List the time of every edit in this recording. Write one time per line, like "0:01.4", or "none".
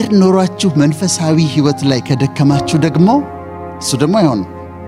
none